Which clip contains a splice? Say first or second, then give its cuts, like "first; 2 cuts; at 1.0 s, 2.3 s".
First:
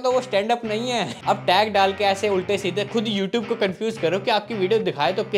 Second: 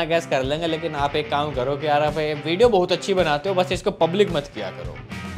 first; 1 cut; at 1.1 s